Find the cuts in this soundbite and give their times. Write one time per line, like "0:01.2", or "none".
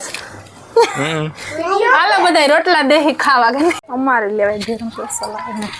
0:03.9